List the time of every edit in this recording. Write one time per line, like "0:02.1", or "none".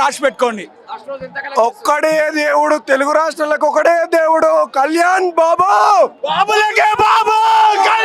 none